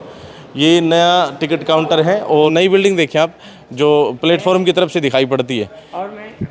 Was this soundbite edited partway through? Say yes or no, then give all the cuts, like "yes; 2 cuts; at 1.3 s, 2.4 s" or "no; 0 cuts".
yes; 1 cut; at 2.5 s